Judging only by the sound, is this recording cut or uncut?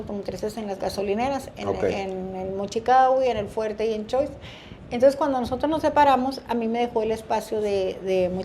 uncut